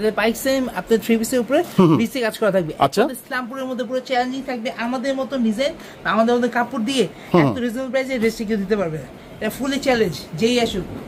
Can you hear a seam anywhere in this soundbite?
no; 0 cuts

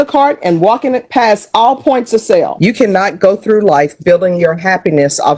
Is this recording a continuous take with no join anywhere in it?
no; 1 cut; at 2.5 s

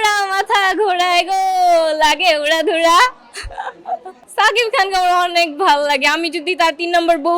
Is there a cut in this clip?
yes; 1 cut; at 4.2 s

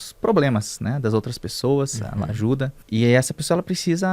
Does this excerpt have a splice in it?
yes; 1 cut; at 2.8 s

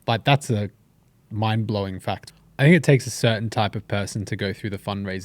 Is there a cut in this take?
yes; 1 cut; at 2.3 s

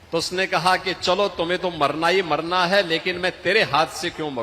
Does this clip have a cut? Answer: no; 0 cuts

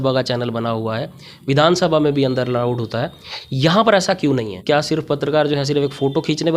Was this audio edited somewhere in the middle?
yes; 1 cut; at 4.5 s

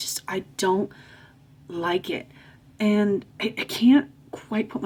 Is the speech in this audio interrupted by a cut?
no; 0 cuts

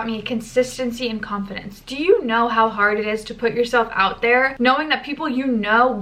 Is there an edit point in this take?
no; 0 cuts

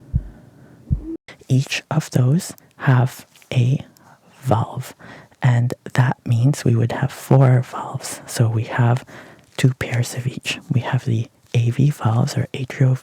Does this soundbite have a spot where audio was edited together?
yes; 1 cut; at 1.0 s

